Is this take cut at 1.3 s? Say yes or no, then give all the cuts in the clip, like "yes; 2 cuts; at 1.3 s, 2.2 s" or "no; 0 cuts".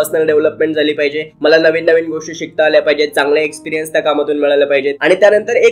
no; 0 cuts